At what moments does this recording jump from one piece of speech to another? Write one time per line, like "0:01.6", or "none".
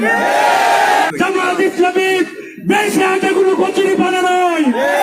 0:01.1